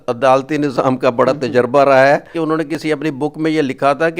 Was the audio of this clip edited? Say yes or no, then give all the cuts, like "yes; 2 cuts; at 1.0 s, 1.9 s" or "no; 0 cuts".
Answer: yes; 1 cut; at 2.3 s